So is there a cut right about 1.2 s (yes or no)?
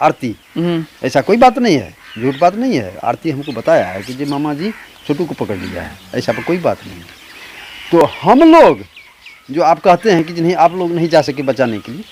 no